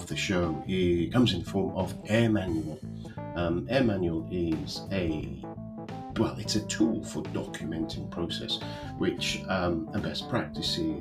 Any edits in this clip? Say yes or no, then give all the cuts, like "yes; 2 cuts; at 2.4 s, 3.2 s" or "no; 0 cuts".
no; 0 cuts